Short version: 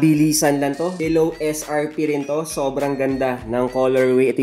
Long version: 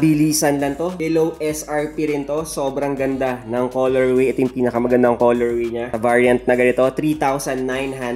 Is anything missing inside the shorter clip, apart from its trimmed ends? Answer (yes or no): no